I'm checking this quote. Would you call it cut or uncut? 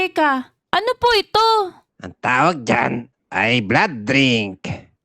uncut